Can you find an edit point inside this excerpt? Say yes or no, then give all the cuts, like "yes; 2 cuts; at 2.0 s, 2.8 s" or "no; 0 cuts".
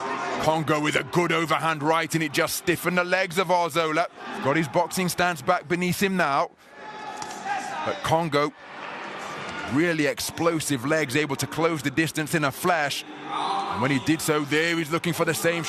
no; 0 cuts